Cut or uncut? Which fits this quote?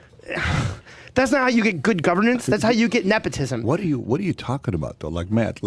cut